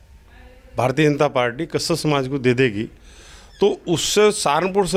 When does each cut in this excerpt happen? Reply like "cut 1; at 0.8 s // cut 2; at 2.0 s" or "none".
none

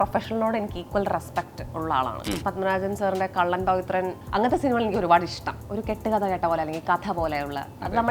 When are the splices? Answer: cut 1; at 2.4 s // cut 2; at 4.2 s // cut 3; at 5.5 s

